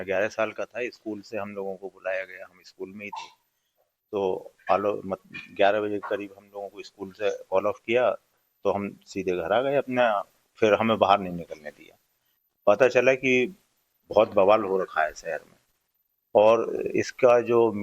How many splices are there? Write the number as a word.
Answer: one